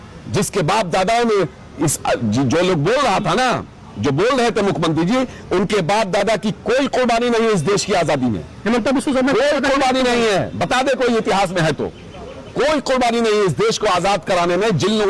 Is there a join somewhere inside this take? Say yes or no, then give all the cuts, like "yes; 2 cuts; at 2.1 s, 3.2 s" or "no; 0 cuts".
no; 0 cuts